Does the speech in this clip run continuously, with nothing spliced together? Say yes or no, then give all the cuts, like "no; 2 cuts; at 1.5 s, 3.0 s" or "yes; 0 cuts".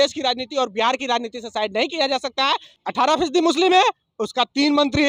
no; 1 cut; at 2.7 s